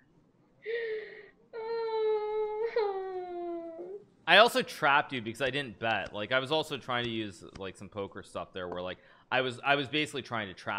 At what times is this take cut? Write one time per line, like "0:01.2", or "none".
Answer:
0:04.1